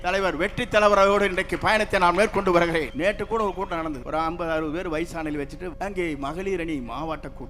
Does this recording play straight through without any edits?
no; 3 cuts; at 2.9 s, 4.0 s, 5.7 s

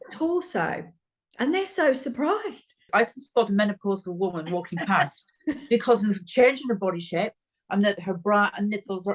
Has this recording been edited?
yes; 1 cut; at 2.9 s

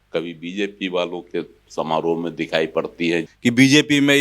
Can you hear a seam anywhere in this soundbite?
yes; 1 cut; at 3.3 s

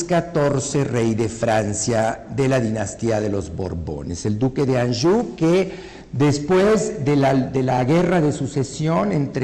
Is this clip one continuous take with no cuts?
yes; 0 cuts

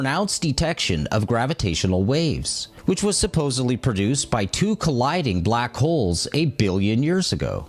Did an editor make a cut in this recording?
yes; 1 cut; at 2.4 s

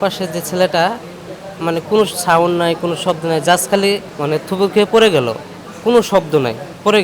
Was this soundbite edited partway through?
no; 0 cuts

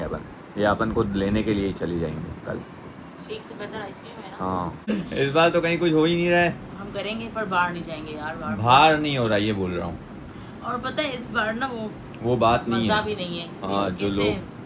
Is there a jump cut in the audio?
yes; 1 cut; at 4.9 s

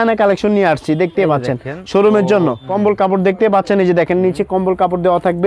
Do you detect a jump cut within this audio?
yes; 1 cut; at 2.6 s

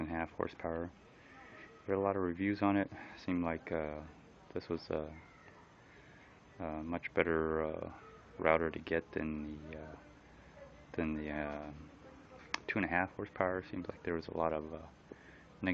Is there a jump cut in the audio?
no; 0 cuts

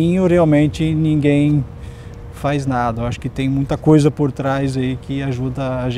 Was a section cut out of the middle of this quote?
no; 0 cuts

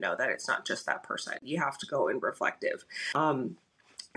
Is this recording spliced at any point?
yes; 2 cuts; at 1.4 s, 2.9 s

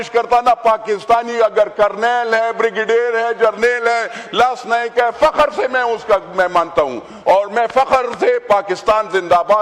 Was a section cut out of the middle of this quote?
no; 0 cuts

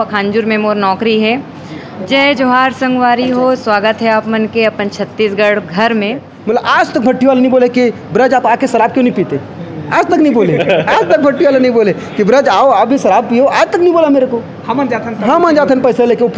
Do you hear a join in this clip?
yes; 2 cuts; at 1.9 s, 6.3 s

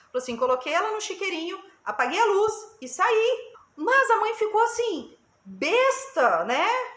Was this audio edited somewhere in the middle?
yes; 1 cut; at 3.6 s

